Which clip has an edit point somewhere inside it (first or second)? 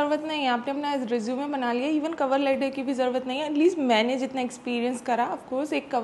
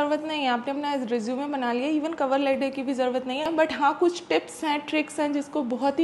second